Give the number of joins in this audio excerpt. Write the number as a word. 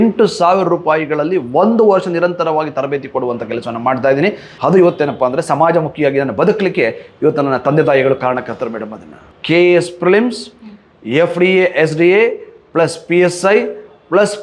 two